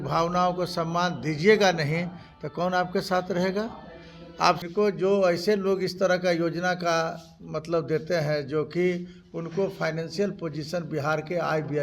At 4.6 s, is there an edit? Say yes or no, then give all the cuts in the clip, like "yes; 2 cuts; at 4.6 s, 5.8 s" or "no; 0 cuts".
yes; 1 cut; at 4.6 s